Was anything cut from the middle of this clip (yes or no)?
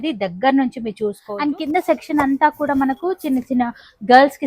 yes